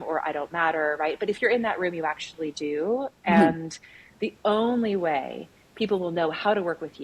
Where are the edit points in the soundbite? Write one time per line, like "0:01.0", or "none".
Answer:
none

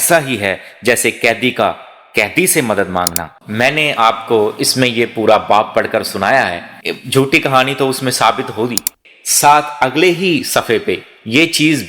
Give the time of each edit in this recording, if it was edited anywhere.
0:03.3
0:09.0

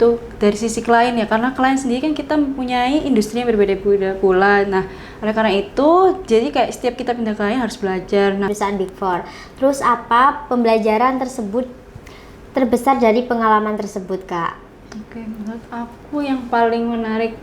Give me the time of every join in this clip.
0:08.5

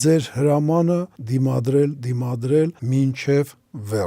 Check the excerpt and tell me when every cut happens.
0:01.2
0:02.8

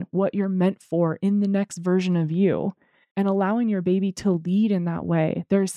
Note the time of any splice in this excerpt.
none

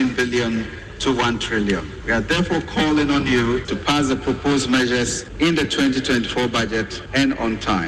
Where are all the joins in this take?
0:01.9
0:03.7
0:05.2
0:07.0

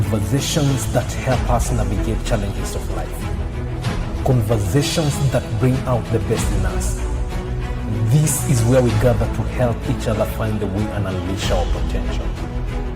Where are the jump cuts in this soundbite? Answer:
none

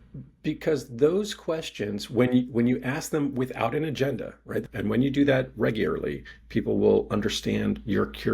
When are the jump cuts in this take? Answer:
0:04.6

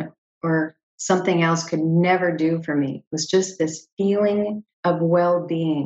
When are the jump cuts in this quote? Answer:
0:04.7

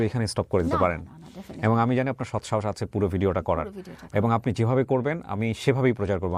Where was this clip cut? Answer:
none

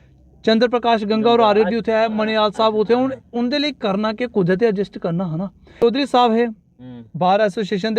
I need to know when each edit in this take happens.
0:05.7

